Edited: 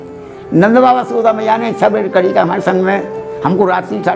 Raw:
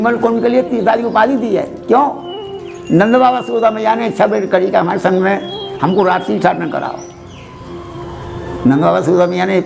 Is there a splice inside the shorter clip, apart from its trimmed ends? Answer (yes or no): no